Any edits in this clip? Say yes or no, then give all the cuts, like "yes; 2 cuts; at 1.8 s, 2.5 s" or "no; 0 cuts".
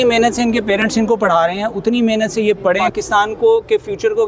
yes; 1 cut; at 2.9 s